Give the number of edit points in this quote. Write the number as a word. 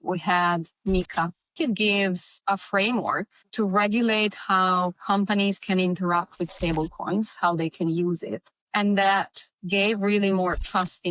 one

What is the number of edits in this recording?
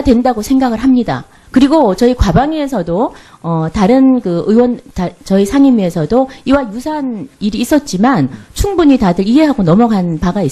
one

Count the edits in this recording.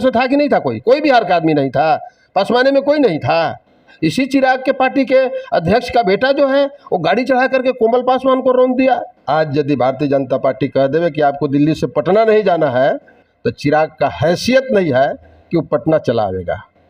two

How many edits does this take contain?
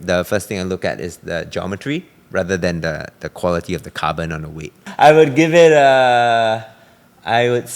one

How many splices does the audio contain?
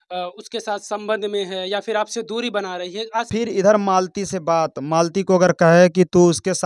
one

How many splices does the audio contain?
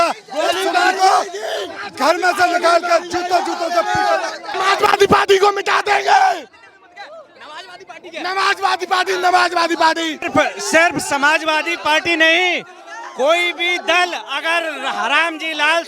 two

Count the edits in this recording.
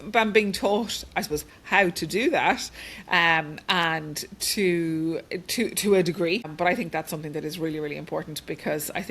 one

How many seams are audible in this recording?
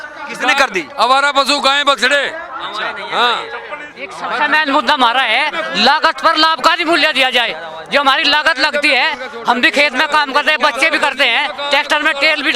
zero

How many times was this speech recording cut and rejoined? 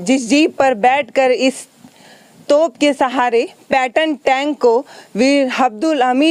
zero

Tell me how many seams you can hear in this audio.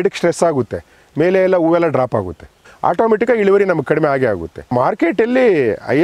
two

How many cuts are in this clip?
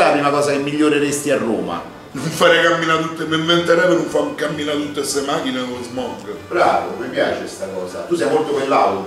one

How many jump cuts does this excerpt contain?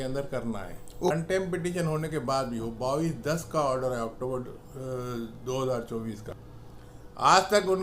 two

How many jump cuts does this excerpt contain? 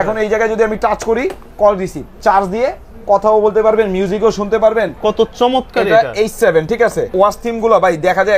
three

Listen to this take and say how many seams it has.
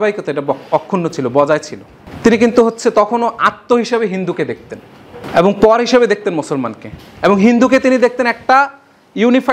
zero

